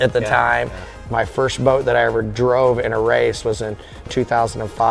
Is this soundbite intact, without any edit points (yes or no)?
no